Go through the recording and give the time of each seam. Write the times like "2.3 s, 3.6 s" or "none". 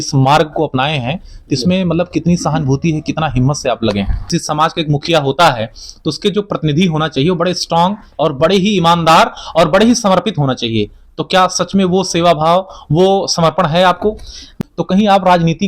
4.3 s, 14.5 s